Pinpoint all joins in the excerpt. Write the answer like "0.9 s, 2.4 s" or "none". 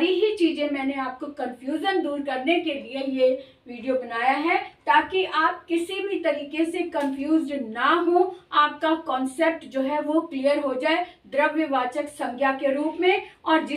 none